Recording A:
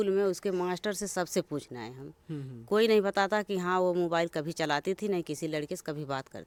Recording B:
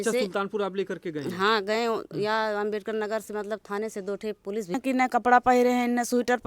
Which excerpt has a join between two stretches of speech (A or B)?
B